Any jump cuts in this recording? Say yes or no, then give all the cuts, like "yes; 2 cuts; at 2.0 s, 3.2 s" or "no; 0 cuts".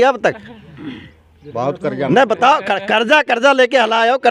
no; 0 cuts